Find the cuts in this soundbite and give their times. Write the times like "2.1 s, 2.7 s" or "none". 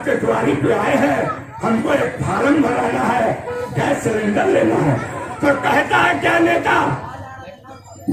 none